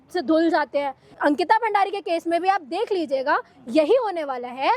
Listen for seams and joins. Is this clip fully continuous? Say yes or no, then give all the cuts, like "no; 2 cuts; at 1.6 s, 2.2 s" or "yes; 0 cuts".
no; 1 cut; at 1.1 s